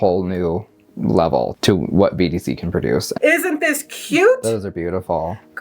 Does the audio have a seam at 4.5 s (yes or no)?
no